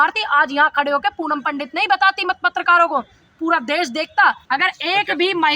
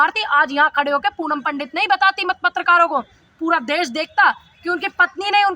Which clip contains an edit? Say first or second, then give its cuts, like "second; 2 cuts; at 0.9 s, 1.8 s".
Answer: first; 1 cut; at 4.4 s